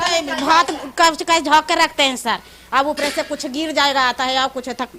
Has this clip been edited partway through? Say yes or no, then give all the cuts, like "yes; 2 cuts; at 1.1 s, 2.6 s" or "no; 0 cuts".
no; 0 cuts